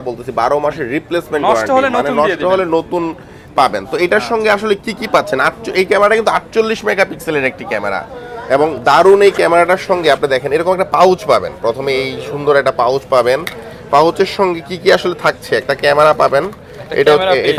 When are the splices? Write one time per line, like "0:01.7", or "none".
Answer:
none

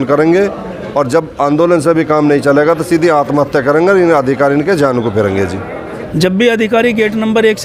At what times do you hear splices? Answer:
0:05.6

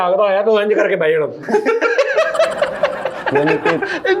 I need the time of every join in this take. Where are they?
none

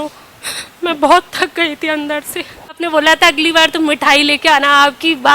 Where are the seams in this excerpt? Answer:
0:02.8

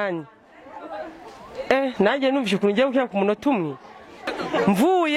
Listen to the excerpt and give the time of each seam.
0:04.3

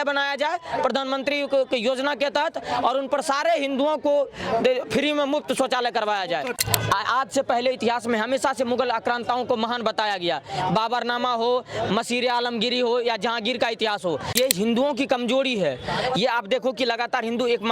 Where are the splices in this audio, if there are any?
0:06.5
0:14.4

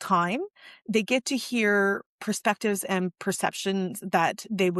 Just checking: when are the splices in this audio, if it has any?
none

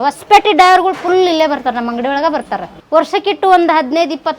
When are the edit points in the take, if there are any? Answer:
0:02.7

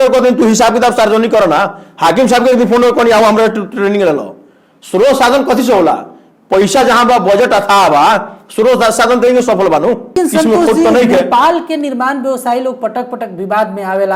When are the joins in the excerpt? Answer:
0:10.1

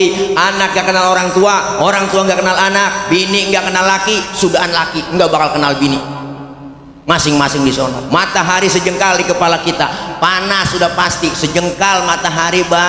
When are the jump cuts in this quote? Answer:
none

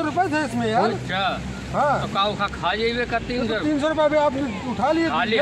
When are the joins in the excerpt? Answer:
0:02.1

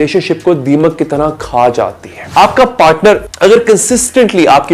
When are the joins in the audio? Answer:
0:02.1
0:03.3

